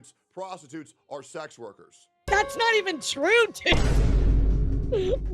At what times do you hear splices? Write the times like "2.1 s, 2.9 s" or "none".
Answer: 2.2 s